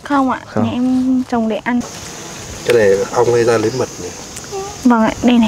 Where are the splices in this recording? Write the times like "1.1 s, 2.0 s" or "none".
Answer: 1.8 s